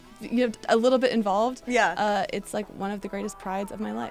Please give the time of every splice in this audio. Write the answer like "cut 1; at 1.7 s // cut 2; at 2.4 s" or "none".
none